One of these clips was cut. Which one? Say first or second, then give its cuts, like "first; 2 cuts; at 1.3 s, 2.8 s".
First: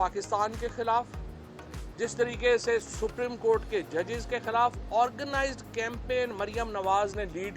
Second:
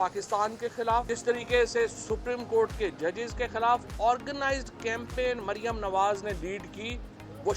second; 1 cut; at 1.1 s